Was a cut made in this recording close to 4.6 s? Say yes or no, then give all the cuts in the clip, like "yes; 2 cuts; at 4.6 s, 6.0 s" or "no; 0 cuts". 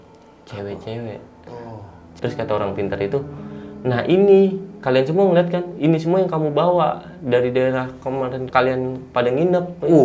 no; 2 cuts; at 2.2 s, 8.4 s